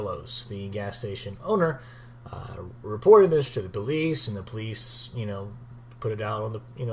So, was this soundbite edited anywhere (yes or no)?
yes